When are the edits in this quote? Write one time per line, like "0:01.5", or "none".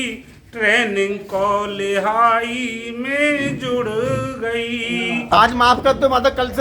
0:05.3

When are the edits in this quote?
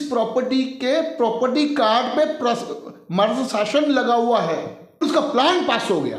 0:05.0

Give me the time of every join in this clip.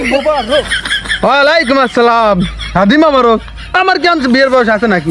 none

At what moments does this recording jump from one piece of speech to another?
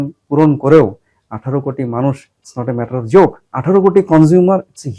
none

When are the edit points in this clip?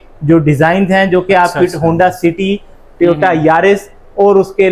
none

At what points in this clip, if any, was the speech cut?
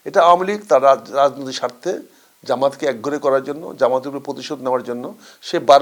none

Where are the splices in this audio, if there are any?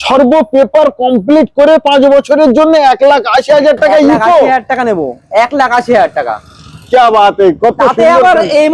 none

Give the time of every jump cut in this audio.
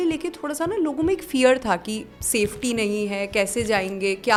none

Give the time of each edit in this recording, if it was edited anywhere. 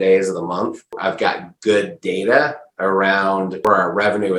0:00.9
0:03.6

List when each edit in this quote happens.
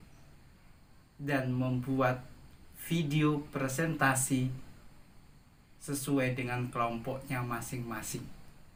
none

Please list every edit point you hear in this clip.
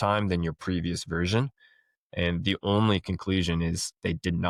none

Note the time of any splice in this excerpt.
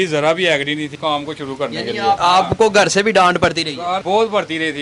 0:00.9
0:02.2
0:04.0

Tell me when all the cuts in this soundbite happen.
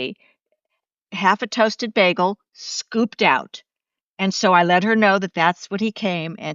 0:01.0

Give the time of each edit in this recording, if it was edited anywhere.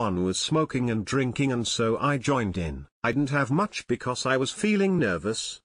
0:03.1

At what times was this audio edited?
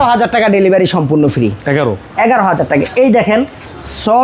none

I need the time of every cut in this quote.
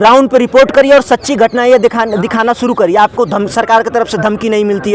none

